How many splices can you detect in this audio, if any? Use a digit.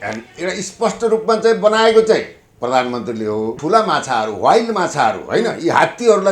1